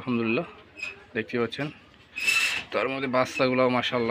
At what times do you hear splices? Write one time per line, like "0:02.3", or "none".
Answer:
none